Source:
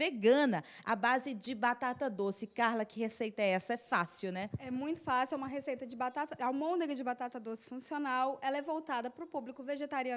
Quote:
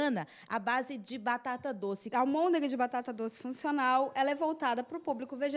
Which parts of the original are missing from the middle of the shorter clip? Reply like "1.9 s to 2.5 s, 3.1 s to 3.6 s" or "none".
2.4 s to 6.3 s